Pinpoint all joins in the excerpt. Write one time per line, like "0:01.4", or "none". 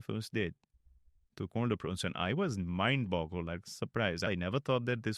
0:04.3